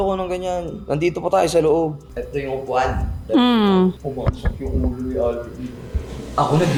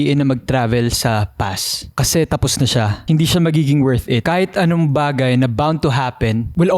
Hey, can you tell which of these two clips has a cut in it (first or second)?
second